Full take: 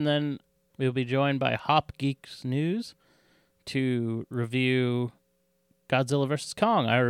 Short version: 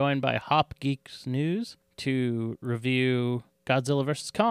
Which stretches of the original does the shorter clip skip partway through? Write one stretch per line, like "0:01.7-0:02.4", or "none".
0:03.0-0:03.5
0:05.2-0:05.7